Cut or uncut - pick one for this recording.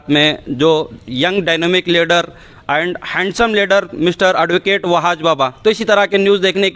uncut